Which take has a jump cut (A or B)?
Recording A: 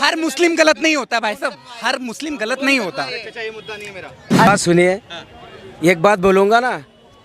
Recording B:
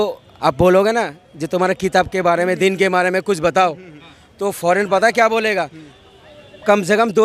A